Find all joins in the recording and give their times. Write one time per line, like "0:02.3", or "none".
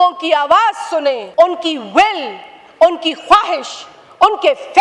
0:01.2